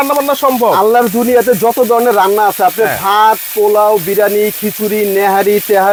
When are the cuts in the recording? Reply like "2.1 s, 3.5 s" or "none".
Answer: none